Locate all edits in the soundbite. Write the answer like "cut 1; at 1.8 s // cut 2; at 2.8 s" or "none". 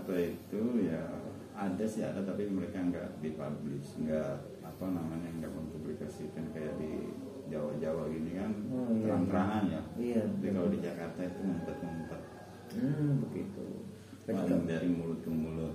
none